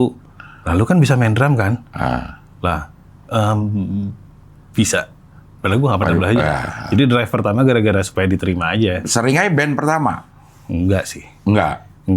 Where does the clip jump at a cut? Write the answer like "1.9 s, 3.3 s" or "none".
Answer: 6.8 s, 9.0 s